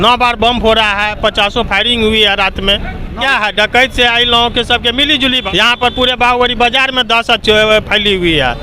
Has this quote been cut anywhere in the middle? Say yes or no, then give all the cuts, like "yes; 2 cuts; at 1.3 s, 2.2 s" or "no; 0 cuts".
yes; 2 cuts; at 3.2 s, 5.4 s